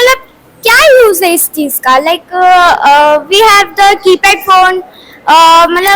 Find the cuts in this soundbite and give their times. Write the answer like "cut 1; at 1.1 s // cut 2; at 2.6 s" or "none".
none